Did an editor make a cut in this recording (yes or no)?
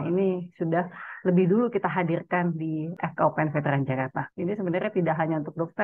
yes